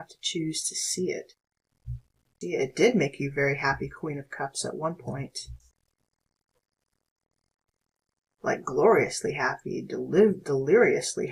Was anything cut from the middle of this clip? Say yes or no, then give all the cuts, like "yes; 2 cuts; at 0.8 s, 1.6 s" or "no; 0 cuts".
yes; 1 cut; at 2.2 s